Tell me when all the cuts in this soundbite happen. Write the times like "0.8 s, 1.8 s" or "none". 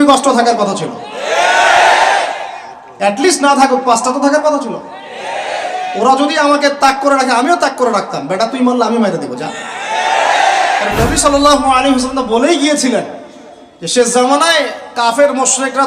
10.9 s